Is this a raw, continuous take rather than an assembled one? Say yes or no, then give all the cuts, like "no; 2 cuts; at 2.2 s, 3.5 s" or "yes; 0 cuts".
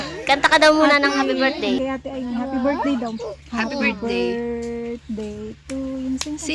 no; 1 cut; at 1.8 s